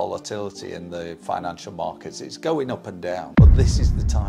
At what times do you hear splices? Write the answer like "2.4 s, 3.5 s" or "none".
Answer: none